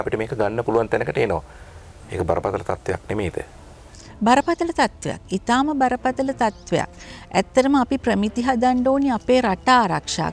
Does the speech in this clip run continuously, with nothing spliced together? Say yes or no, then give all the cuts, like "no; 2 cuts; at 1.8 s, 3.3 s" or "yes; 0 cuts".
yes; 0 cuts